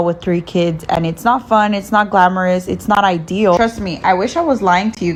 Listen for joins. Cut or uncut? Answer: uncut